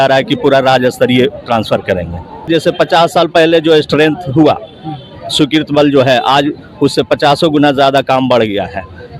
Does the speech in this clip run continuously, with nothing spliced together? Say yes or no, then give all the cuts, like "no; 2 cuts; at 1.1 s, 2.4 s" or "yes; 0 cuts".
no; 1 cut; at 2.5 s